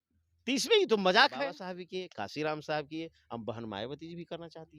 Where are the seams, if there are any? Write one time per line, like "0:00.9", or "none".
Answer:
0:01.8